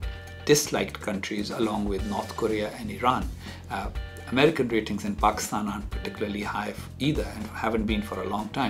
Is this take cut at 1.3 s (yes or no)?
yes